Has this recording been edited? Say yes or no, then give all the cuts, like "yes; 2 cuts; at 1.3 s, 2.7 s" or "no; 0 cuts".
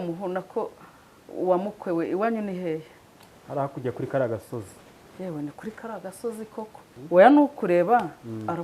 yes; 1 cut; at 6.9 s